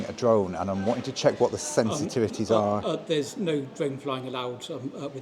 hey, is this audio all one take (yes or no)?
yes